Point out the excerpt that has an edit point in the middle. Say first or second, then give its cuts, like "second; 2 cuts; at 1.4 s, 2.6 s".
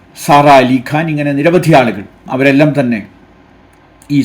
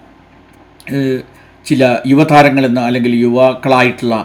first; 1 cut; at 2.3 s